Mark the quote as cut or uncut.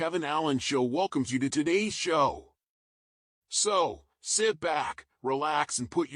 uncut